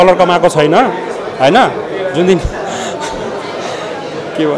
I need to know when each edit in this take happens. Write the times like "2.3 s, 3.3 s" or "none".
none